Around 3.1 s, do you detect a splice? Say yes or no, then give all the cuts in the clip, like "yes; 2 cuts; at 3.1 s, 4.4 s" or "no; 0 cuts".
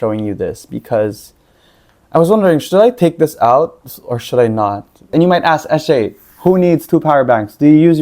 no; 1 cut; at 5.0 s